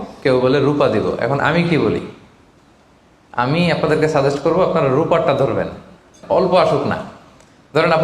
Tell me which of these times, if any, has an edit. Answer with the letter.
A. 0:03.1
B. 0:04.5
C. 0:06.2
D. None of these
C